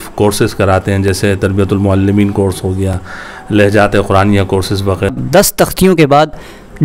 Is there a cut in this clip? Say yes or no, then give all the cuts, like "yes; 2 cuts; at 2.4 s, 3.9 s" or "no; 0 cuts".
yes; 1 cut; at 5.2 s